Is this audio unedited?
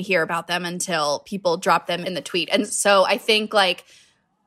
no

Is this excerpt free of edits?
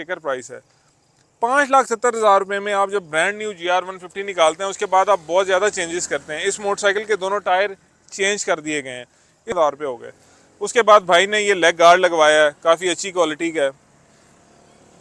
no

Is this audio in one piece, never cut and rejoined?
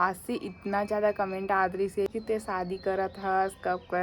no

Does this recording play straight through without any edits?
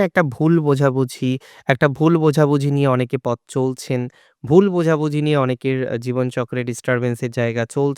yes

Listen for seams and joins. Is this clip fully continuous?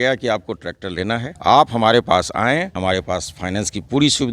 no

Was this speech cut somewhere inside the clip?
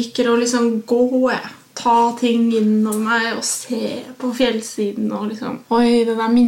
yes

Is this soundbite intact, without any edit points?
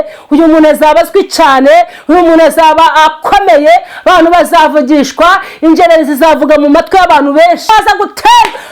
no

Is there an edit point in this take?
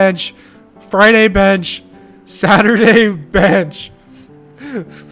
no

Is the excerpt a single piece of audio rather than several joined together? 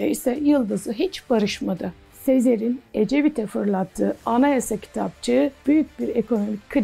no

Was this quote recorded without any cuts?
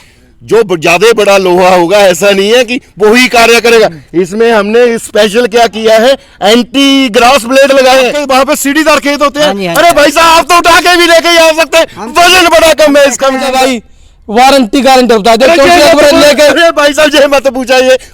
no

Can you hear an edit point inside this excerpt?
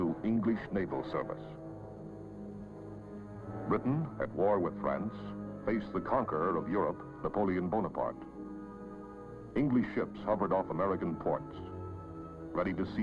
no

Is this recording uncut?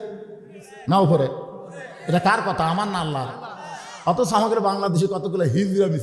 yes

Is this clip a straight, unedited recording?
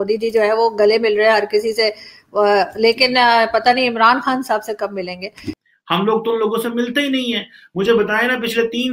no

